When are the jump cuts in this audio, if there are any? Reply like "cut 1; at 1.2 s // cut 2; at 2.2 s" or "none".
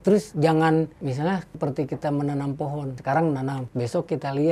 cut 1; at 1.1 s // cut 2; at 2.9 s // cut 3; at 3.6 s